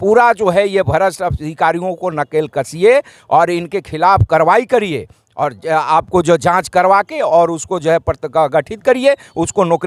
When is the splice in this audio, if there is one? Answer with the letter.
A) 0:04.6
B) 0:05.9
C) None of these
C